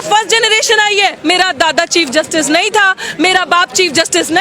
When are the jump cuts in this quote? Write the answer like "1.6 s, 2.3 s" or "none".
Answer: 1.2 s